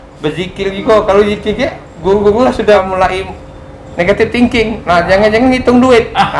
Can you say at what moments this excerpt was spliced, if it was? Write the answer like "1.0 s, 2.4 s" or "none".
2.8 s